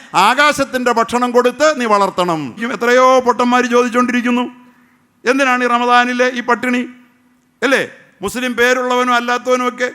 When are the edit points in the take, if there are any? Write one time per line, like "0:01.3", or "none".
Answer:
0:02.7